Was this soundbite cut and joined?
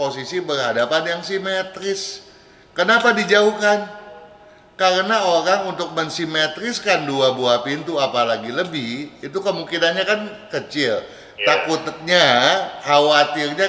no; 0 cuts

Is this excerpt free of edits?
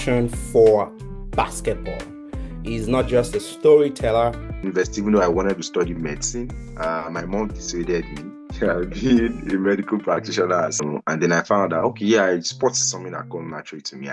no; 2 cuts; at 4.5 s, 10.8 s

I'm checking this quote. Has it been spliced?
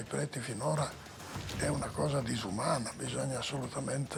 no; 0 cuts

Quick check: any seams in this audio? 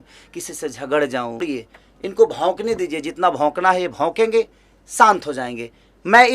yes; 1 cut; at 1.4 s

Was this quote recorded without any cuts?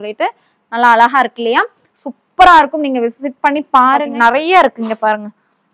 no; 1 cut; at 4.1 s

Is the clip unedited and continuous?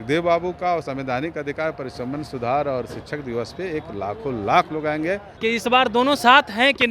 no; 1 cut; at 5.3 s

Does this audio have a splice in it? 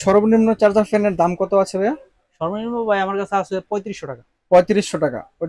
no; 0 cuts

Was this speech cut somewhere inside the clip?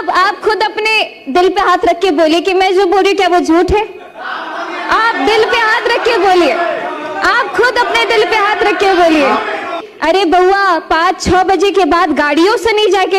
yes; 1 cut; at 9.9 s

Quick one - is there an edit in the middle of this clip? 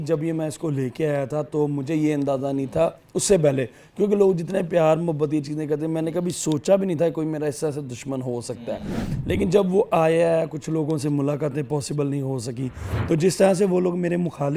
no; 0 cuts

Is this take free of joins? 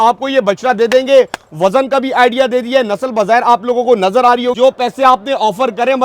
no; 1 cut; at 4.5 s

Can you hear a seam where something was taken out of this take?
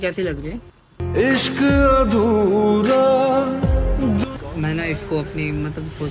yes; 1 cut; at 4.4 s

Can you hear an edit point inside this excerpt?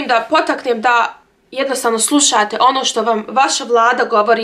no; 0 cuts

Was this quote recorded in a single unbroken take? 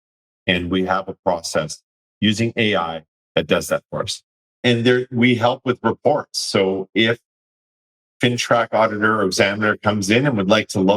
no; 1 cut; at 4.4 s

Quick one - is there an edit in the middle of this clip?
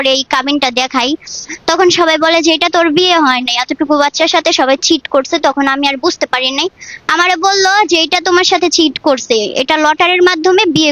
no; 0 cuts

